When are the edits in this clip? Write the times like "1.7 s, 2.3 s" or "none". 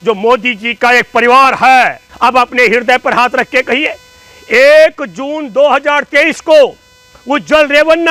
2.1 s